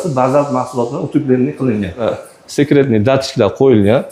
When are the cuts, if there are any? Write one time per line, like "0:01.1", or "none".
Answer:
0:02.1